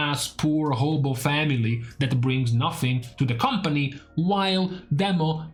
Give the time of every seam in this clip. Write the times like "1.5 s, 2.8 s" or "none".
none